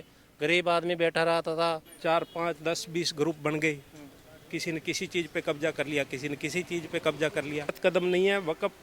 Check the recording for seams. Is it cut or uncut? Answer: cut